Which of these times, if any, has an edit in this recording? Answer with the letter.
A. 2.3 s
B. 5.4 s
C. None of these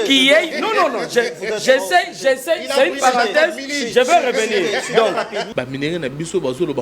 B